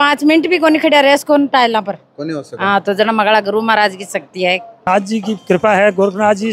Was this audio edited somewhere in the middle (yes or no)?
yes